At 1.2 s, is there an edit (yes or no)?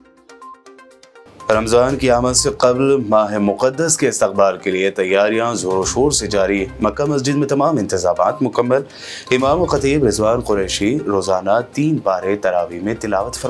yes